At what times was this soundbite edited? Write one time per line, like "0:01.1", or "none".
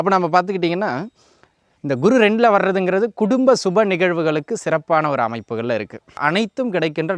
0:06.2